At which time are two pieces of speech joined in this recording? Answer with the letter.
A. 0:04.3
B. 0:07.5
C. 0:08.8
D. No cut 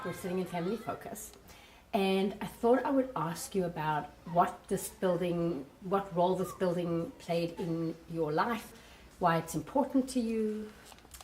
C